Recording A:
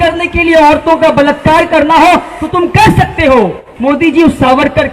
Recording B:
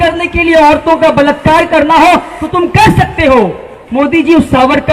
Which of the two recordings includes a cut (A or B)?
A